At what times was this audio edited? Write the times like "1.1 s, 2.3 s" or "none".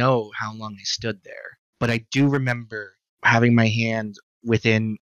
1.6 s